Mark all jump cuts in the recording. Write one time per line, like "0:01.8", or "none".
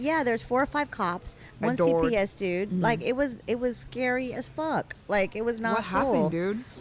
none